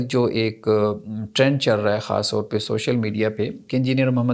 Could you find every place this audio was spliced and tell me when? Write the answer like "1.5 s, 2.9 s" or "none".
none